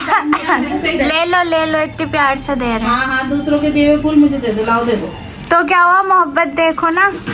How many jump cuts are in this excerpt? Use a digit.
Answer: 0